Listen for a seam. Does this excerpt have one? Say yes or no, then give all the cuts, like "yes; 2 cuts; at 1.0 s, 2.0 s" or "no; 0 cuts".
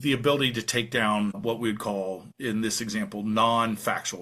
yes; 1 cut; at 2.3 s